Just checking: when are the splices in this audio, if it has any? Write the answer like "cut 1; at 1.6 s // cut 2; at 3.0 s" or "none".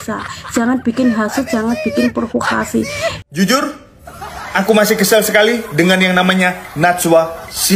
cut 1; at 3.2 s